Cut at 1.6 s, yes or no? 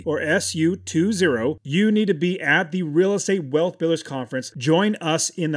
yes